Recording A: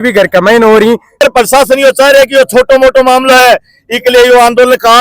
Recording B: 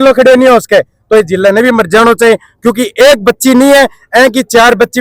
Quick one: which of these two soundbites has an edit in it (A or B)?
A